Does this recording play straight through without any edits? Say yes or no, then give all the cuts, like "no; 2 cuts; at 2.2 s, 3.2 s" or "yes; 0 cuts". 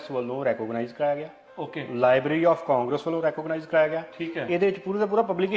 yes; 0 cuts